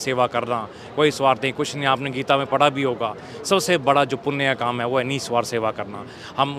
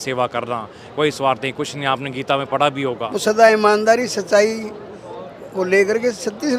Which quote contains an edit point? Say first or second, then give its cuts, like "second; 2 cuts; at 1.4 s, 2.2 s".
second; 1 cut; at 3.1 s